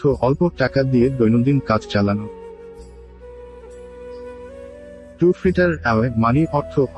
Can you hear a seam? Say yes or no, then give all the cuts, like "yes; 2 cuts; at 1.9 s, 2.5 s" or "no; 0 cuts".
no; 0 cuts